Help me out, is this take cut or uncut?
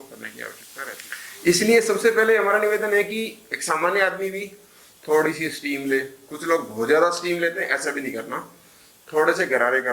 cut